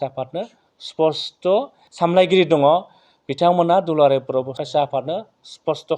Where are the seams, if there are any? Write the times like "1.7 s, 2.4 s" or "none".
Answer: 1.8 s, 4.6 s